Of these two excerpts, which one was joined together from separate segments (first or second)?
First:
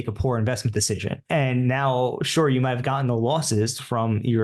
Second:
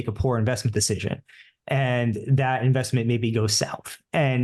first